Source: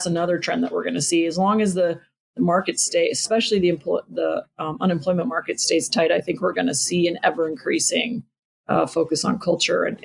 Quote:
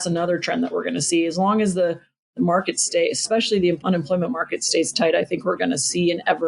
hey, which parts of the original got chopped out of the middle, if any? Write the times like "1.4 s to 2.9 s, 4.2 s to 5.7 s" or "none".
3.8 s to 4.8 s